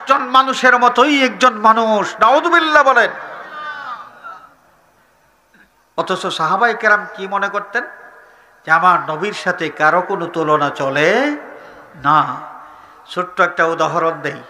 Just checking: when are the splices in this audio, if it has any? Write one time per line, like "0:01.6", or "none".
none